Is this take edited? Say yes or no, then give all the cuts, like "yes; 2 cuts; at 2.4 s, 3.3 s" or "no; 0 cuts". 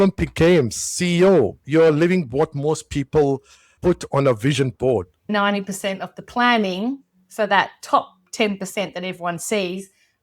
yes; 1 cut; at 5.3 s